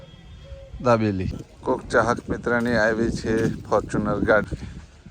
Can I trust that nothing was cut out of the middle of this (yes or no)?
no